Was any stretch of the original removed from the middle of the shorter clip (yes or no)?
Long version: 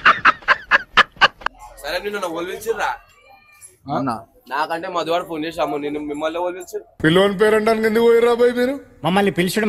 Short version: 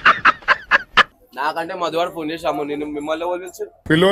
yes